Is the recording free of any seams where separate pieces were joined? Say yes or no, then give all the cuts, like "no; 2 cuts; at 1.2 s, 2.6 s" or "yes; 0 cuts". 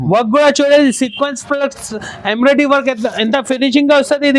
yes; 0 cuts